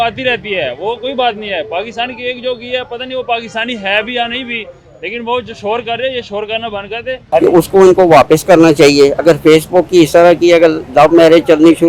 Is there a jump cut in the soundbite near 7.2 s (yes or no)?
yes